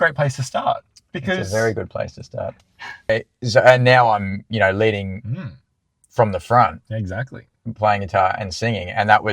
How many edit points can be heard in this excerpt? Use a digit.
1